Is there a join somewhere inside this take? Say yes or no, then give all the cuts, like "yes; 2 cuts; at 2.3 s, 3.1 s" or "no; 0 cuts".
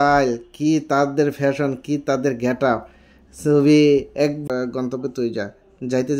yes; 1 cut; at 4.4 s